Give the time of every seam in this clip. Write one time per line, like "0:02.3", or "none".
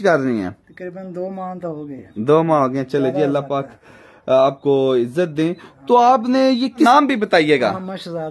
0:06.9

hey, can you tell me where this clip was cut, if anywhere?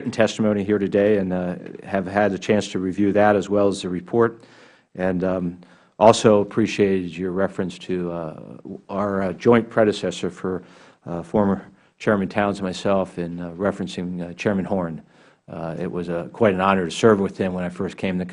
none

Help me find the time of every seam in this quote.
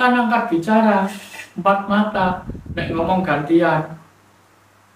none

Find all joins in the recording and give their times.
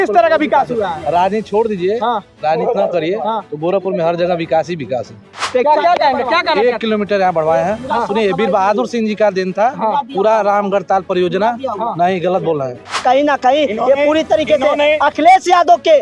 0:05.4
0:12.9

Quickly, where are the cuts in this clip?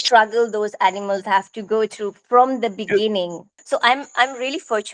0:03.5

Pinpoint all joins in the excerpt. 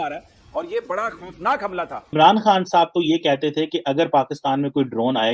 0:02.0

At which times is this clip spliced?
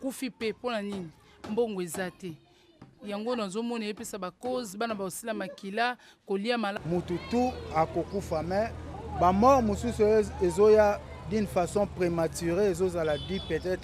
0:06.7

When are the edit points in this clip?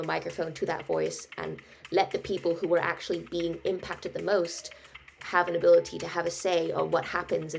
0:05.1

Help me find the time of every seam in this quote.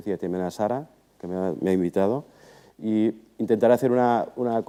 none

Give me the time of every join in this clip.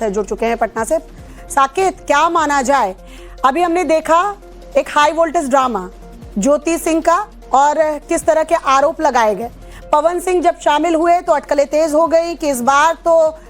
0:07.3

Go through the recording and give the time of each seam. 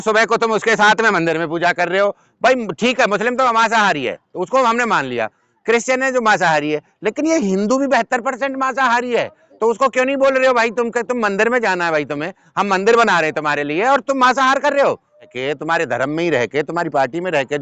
0:02.2
0:15.3

